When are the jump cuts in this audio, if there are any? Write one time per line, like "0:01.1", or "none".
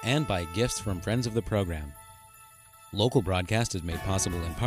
none